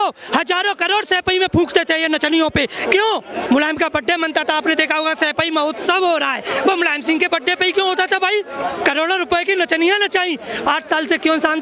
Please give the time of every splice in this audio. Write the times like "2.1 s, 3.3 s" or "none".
3.4 s, 8.6 s